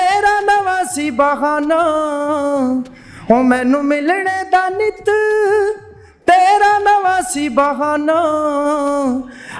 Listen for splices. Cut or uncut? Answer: uncut